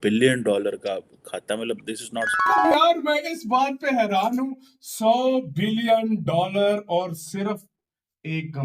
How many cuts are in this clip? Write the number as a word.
one